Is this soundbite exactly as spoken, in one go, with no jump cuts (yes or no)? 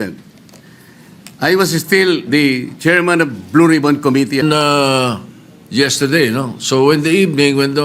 no